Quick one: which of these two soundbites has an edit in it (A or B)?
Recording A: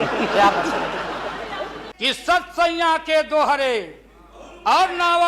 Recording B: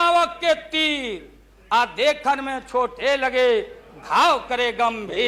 A